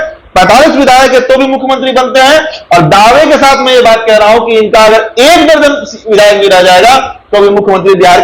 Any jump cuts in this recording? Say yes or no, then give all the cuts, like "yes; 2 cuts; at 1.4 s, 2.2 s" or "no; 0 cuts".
no; 0 cuts